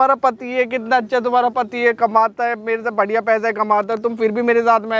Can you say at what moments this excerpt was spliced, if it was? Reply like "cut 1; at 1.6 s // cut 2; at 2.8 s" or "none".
none